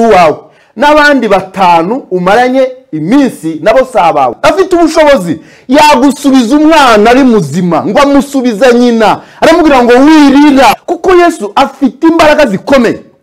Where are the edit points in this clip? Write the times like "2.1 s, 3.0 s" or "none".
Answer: 4.4 s, 10.7 s